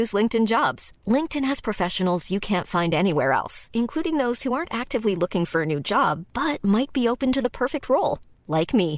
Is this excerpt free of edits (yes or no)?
yes